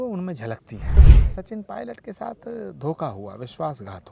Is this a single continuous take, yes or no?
no